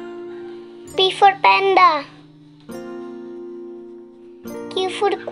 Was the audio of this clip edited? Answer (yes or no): yes